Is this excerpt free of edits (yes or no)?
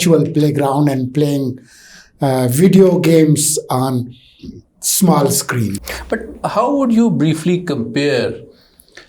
no